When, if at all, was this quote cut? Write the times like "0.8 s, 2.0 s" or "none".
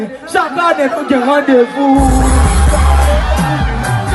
none